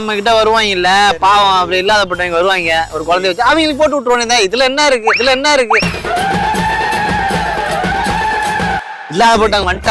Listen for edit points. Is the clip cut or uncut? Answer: uncut